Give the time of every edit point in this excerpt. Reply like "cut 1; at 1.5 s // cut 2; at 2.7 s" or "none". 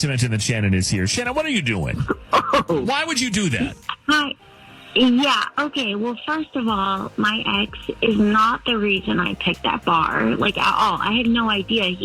none